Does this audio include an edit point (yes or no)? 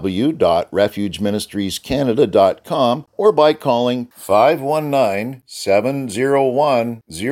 yes